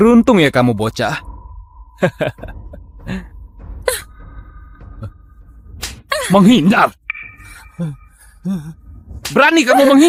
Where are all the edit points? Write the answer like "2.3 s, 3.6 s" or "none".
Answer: none